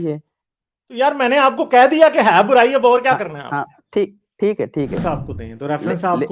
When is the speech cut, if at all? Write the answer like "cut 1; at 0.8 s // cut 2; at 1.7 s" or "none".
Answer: cut 1; at 5.0 s